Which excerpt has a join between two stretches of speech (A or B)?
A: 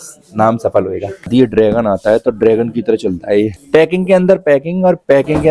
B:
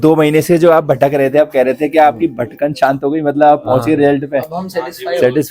A